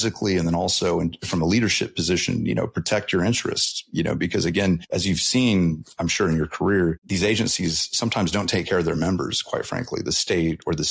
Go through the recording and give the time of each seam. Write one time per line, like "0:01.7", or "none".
0:04.9
0:07.0